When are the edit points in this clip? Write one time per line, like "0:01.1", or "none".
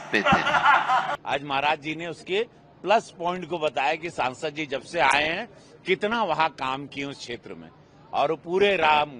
0:01.2